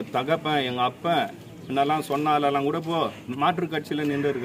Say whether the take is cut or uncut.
uncut